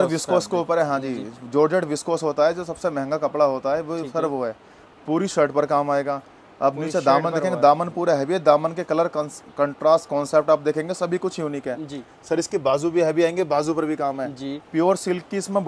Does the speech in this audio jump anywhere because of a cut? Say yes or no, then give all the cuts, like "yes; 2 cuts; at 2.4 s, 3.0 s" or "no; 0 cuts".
no; 0 cuts